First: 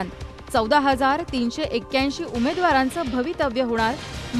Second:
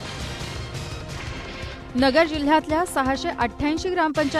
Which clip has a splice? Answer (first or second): second